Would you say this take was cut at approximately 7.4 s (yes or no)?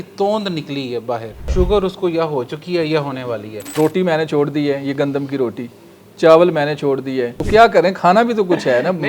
yes